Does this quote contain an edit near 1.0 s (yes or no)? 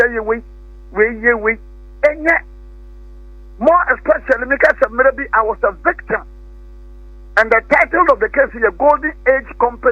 yes